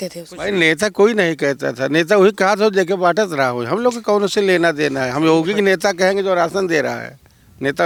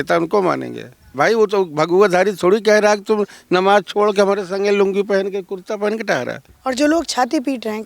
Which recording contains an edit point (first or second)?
second